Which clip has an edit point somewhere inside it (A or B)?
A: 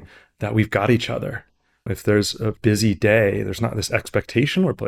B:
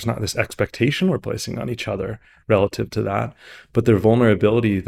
A